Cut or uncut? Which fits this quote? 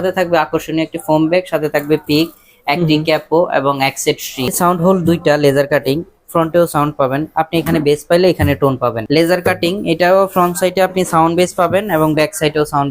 cut